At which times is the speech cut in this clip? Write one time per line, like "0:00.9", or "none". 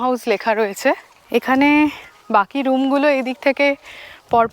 0:01.1